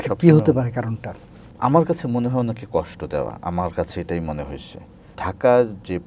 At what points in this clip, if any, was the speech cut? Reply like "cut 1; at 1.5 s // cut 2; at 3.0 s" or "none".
cut 1; at 1.4 s // cut 2; at 5.2 s

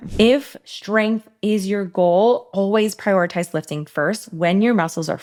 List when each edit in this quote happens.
none

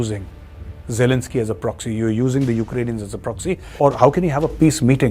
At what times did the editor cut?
cut 1; at 3.7 s

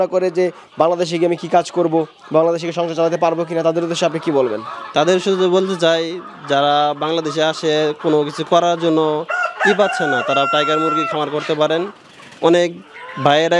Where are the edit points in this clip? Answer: none

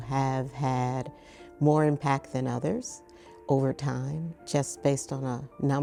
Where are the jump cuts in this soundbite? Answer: none

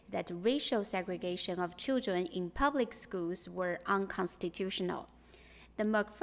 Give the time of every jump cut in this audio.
none

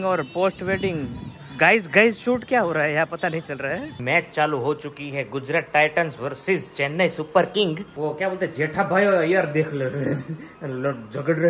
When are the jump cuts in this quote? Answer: cut 1; at 4.0 s // cut 2; at 7.9 s

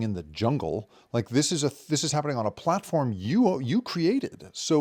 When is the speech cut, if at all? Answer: none

